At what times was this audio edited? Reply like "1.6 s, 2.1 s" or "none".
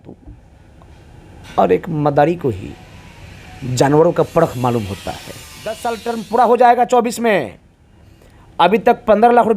5.8 s